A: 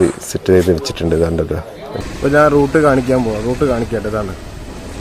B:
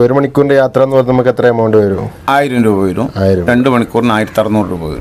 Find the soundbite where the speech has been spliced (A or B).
A